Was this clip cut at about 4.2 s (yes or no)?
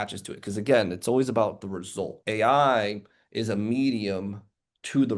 no